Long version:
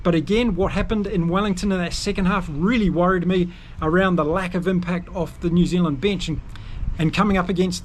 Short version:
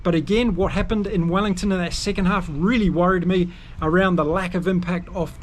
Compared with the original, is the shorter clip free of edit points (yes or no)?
yes